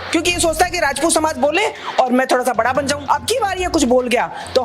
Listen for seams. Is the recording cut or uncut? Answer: cut